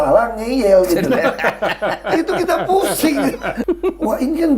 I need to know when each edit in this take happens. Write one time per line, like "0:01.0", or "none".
0:03.6